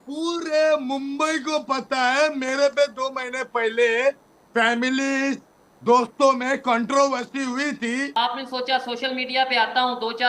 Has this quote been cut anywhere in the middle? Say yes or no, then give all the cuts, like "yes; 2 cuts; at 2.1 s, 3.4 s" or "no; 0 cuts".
yes; 1 cut; at 8.1 s